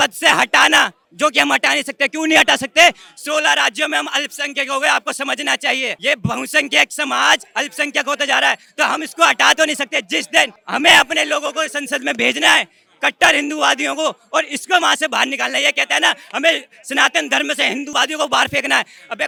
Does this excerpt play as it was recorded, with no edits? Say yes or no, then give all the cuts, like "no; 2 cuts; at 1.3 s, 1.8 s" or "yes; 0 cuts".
yes; 0 cuts